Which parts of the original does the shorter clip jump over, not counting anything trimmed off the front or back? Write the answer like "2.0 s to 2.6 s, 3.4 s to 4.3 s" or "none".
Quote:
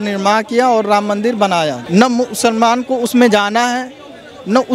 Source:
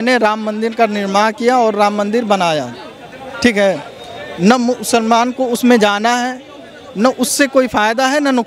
2.7 s to 4.3 s